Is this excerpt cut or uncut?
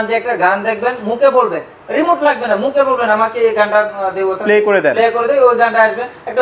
uncut